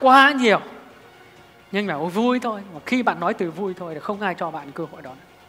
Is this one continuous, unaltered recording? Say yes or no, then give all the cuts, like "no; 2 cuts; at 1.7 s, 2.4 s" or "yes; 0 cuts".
yes; 0 cuts